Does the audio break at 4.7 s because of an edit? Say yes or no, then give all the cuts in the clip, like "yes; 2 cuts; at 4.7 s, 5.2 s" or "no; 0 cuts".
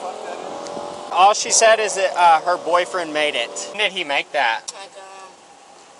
yes; 3 cuts; at 1.1 s, 3.8 s, 4.7 s